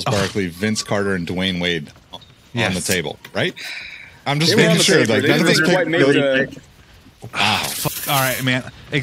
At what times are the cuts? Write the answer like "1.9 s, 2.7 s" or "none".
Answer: none